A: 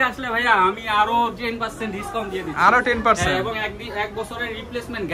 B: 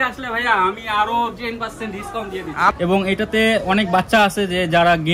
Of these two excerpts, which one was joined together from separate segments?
B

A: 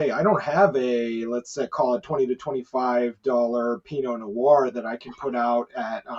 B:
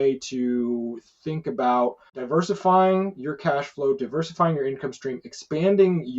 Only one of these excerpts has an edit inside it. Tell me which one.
B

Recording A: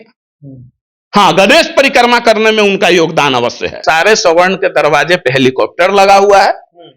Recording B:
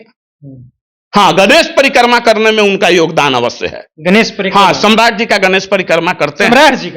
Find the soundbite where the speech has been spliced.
A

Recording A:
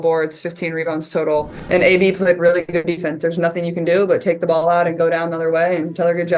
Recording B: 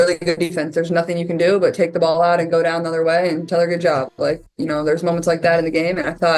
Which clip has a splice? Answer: A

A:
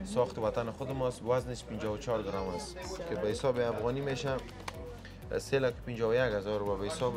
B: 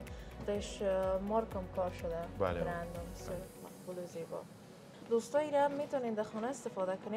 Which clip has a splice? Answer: B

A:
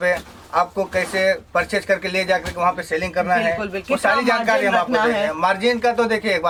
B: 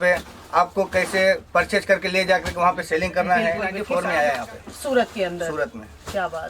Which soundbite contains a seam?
B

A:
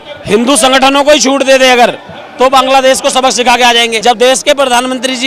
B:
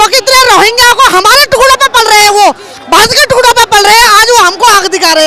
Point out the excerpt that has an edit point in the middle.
A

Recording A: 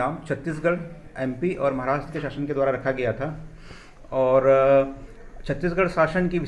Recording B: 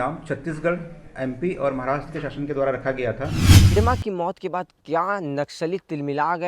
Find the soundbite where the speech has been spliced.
B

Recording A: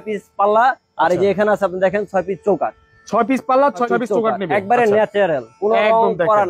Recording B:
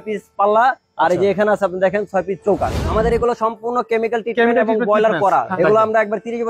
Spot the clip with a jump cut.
B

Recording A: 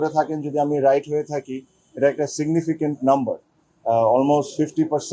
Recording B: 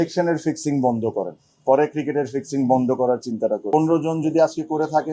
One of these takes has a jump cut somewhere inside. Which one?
B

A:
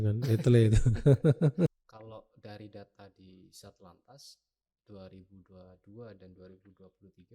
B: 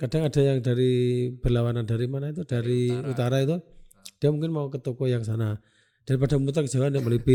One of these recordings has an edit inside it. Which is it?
A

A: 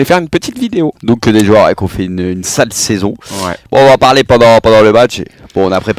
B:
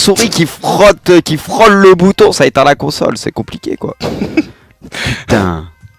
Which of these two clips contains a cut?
A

